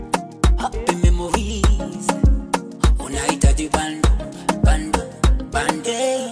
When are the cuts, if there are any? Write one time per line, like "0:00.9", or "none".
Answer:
none